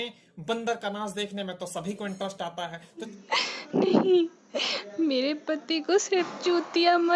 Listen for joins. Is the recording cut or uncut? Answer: cut